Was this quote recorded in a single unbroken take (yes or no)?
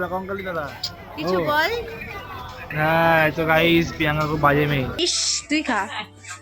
no